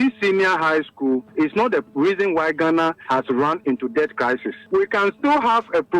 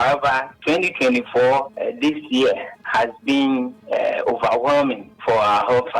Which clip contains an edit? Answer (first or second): first